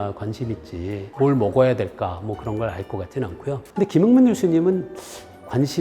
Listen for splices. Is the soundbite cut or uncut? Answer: cut